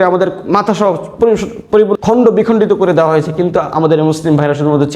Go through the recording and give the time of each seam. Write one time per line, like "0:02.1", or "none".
0:01.9

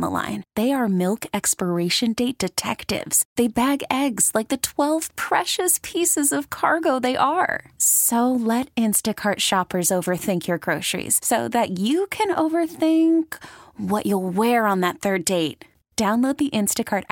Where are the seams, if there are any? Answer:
none

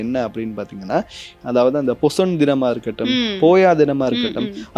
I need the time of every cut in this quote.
0:01.4

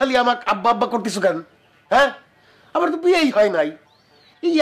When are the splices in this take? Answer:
none

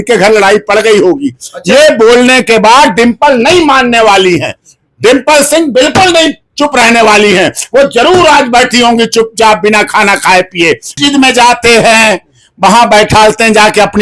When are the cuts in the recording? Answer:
0:11.0

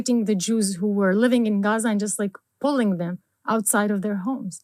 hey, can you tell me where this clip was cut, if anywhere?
none

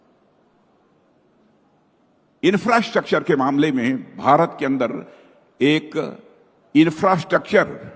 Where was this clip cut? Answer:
none

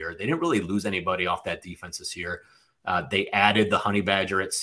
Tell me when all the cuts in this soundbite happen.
none

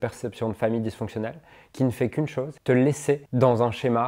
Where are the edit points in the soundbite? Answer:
0:02.5
0:03.3

